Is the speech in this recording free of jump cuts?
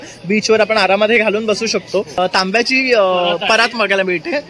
no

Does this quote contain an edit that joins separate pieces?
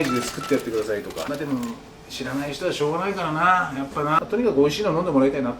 yes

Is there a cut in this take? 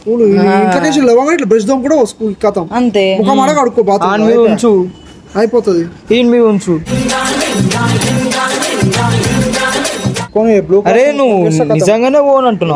no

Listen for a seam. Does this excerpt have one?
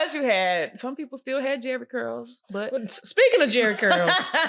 no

